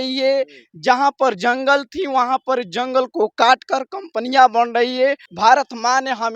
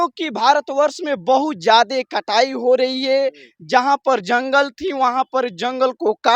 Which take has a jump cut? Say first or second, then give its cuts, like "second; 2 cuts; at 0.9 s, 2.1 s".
first; 1 cut; at 5.3 s